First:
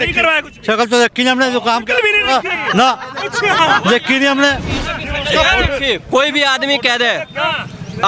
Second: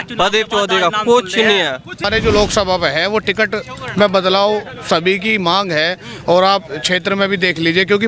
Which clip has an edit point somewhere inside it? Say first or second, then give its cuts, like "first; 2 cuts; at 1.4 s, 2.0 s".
second; 1 cut; at 2.1 s